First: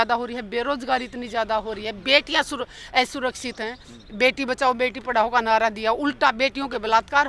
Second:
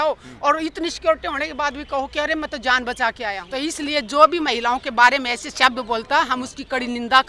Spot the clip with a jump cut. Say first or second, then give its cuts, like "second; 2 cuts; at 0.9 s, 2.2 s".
second; 1 cut; at 3.4 s